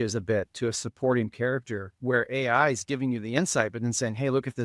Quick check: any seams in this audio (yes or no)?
no